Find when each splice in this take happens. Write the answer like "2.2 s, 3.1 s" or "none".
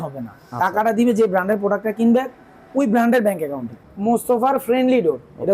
4.2 s